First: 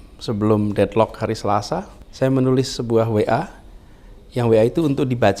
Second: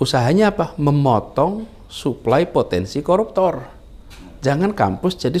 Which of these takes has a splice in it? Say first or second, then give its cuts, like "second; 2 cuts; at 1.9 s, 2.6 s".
first; 1 cut; at 2.0 s